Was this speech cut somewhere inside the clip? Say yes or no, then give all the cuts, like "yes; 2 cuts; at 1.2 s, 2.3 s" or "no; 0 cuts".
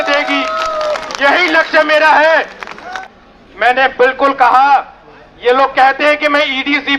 yes; 1 cut; at 2.9 s